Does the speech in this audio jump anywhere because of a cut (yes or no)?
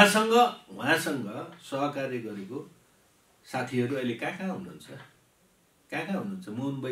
no